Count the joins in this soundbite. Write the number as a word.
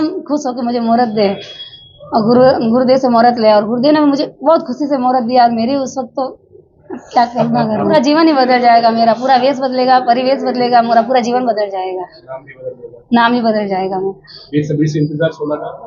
one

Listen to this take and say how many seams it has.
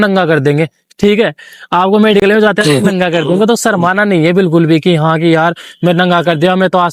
zero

